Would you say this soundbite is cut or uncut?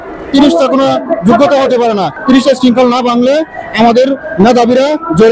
cut